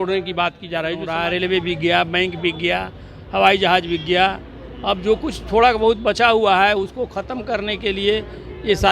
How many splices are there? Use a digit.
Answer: 1